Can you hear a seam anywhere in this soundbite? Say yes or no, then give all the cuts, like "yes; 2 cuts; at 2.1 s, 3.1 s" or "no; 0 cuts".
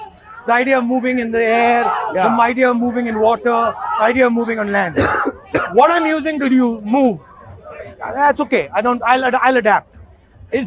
no; 0 cuts